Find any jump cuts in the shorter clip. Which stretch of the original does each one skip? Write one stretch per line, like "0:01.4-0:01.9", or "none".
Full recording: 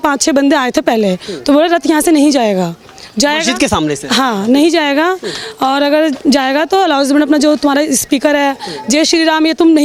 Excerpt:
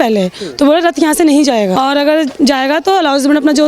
0:02.6-0:05.6